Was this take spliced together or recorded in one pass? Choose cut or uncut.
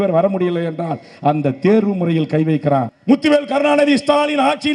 cut